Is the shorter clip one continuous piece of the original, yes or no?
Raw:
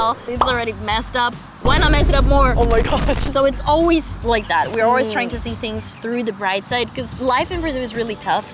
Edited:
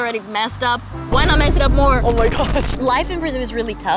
no